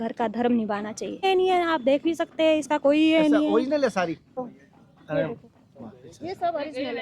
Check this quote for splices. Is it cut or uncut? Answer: cut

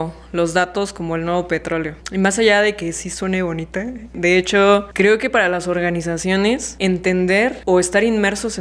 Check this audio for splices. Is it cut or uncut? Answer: cut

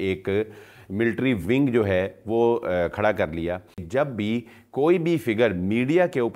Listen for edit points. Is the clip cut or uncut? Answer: cut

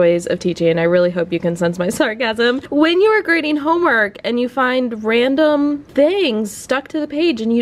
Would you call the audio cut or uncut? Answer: uncut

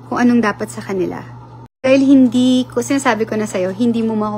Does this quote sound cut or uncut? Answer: cut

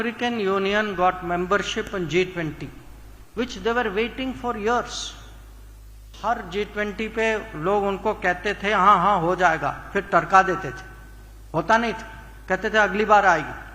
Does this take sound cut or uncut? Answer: uncut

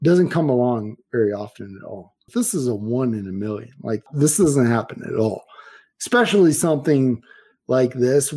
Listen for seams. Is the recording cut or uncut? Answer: cut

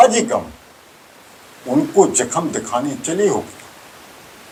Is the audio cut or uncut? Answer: uncut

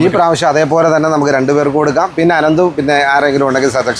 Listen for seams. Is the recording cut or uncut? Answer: uncut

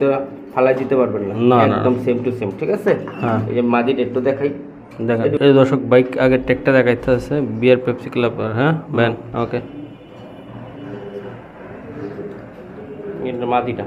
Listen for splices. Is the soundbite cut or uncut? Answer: uncut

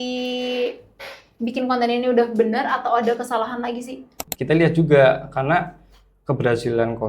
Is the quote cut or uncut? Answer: cut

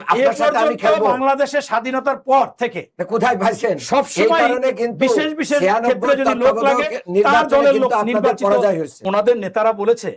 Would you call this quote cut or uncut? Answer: cut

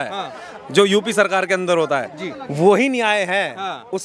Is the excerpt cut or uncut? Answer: uncut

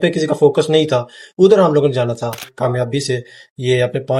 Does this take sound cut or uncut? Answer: cut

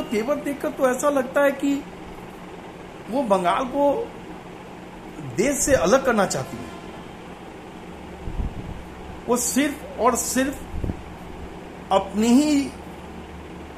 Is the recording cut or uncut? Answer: uncut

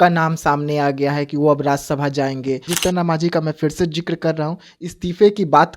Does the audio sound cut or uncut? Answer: cut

